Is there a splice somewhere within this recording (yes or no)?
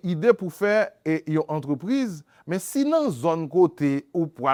no